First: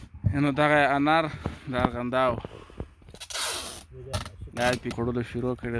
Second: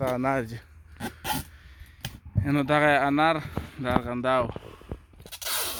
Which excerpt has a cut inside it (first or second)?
first